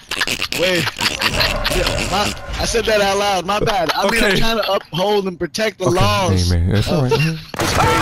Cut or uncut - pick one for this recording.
uncut